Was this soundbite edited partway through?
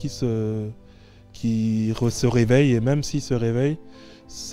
no; 0 cuts

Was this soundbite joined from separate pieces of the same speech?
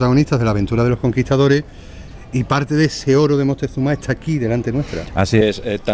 no; 0 cuts

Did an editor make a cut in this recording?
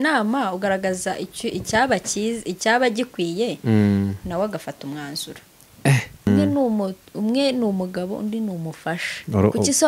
yes; 1 cut; at 6.3 s

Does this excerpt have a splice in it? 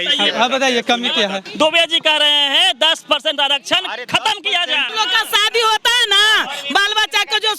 yes; 2 cuts; at 1.5 s, 4.8 s

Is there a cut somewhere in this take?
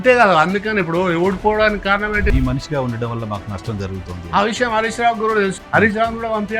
yes; 2 cuts; at 2.3 s, 5.6 s

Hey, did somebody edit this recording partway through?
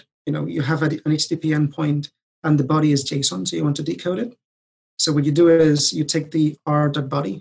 no; 0 cuts

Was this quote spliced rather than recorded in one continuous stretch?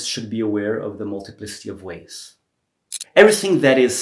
yes; 1 cut; at 3.0 s

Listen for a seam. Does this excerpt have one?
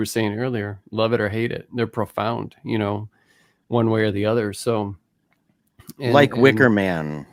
no; 0 cuts

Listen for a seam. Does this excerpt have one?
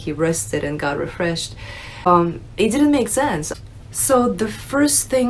yes; 2 cuts; at 2.1 s, 3.5 s

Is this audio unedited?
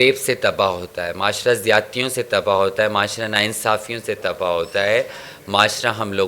yes; 0 cuts

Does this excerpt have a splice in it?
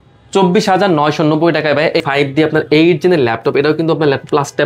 yes; 1 cut; at 2.0 s

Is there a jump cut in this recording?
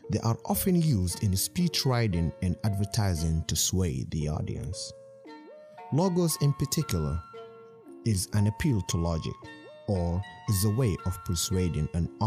no; 0 cuts

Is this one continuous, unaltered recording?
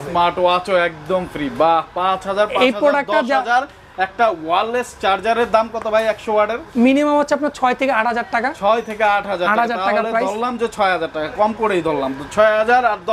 yes; 0 cuts

